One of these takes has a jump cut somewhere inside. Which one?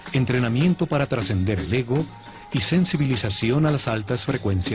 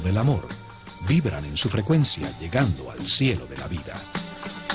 second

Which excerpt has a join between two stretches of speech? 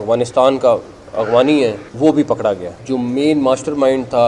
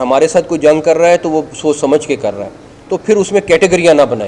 first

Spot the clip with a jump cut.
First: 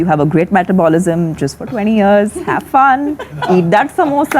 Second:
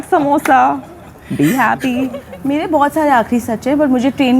second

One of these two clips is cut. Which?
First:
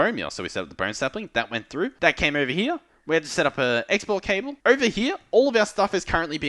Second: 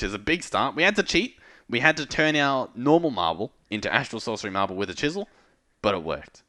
first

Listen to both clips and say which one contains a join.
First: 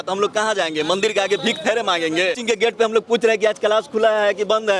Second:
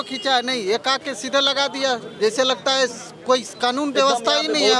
first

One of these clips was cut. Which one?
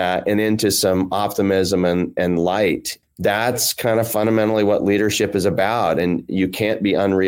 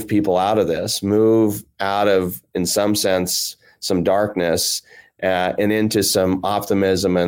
first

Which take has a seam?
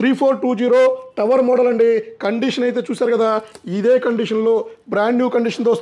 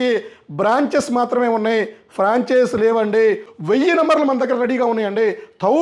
second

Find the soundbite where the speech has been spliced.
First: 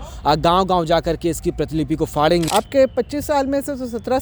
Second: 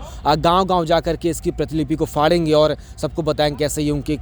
first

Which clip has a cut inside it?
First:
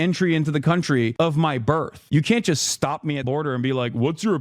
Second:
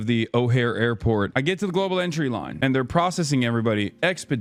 first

